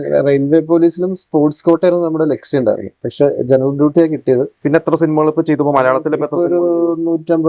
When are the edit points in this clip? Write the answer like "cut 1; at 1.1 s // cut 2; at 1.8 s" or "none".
cut 1; at 4.6 s

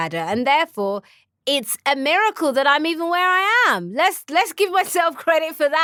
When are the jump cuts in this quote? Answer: none

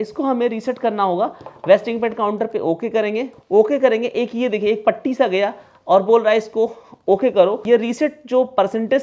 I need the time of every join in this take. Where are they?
cut 1; at 3.4 s // cut 2; at 7.6 s

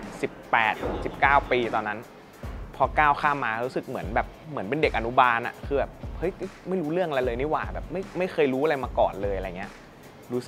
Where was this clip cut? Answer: none

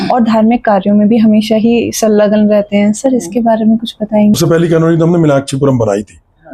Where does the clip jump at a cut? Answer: cut 1; at 4.4 s

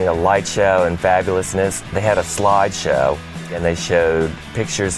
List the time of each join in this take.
cut 1; at 1.8 s // cut 2; at 3.6 s

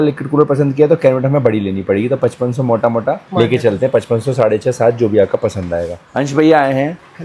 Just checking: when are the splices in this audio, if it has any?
cut 1; at 6.1 s

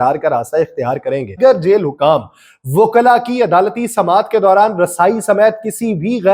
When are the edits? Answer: cut 1; at 1.4 s

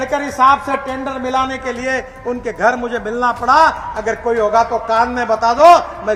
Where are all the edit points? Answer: none

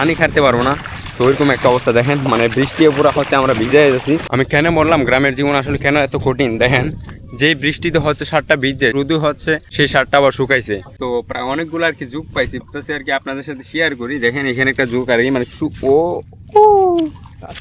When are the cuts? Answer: cut 1; at 4.3 s // cut 2; at 9.1 s // cut 3; at 10.9 s // cut 4; at 12.6 s

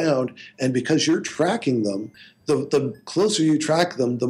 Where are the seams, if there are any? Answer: none

